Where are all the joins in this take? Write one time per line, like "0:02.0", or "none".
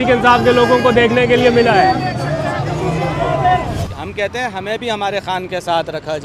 0:03.9